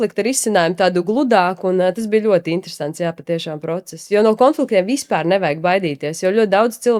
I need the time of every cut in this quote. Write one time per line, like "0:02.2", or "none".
none